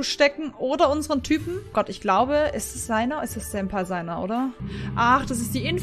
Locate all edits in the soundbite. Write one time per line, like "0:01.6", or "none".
0:01.7
0:04.6